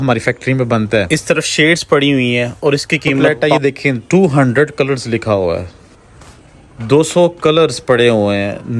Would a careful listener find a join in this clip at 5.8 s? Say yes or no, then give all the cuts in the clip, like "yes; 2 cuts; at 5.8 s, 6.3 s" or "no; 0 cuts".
no; 2 cuts; at 1.1 s, 3.3 s